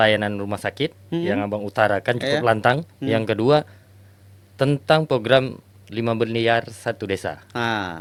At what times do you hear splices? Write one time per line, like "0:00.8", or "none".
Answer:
none